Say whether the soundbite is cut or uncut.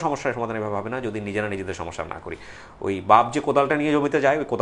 uncut